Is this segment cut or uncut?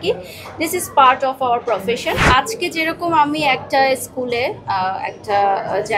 cut